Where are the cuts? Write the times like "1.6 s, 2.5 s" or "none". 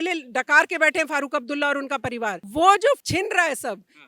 2.4 s, 3.0 s